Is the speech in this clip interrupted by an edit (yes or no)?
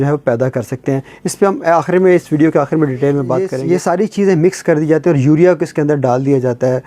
yes